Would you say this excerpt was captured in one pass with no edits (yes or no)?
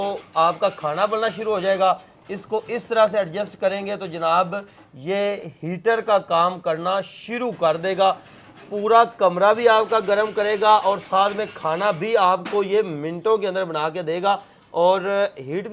yes